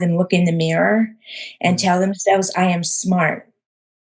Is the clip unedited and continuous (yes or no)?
yes